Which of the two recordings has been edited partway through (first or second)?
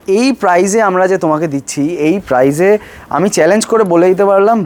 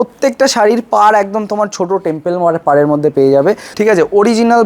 second